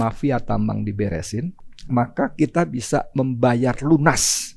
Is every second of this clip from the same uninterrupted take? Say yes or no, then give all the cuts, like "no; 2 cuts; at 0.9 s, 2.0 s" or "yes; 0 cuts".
no; 1 cut; at 1.6 s